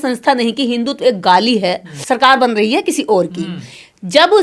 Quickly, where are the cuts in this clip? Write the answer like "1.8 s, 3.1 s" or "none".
1.9 s